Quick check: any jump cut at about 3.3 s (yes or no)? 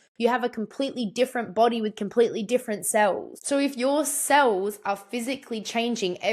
yes